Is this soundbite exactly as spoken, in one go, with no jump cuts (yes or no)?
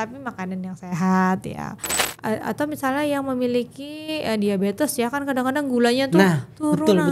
no